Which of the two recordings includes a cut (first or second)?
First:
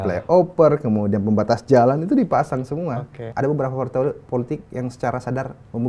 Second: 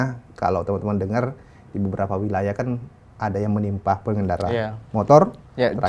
first